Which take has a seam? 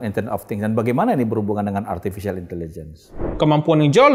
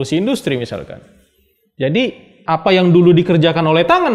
first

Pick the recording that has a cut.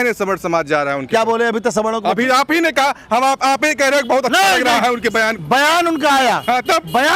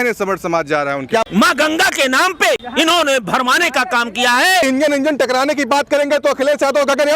second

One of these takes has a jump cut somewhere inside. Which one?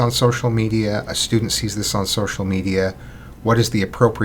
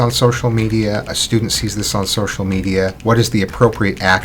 second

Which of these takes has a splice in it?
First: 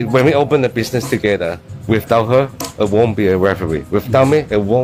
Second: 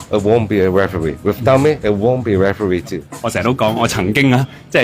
second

